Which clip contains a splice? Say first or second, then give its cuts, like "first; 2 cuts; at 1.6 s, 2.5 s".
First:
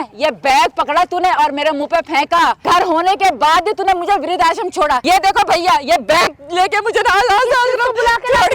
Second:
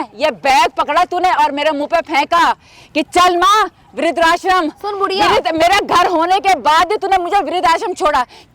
first; 2 cuts; at 2.6 s, 5.0 s